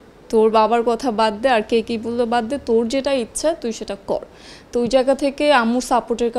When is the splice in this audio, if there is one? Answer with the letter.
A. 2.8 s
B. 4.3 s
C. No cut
C